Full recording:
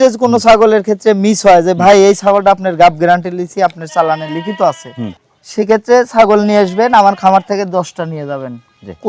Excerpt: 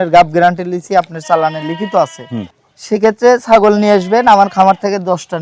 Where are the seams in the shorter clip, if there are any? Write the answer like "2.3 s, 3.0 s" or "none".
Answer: none